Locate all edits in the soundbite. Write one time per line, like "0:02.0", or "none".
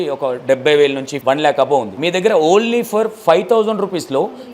0:01.1
0:01.9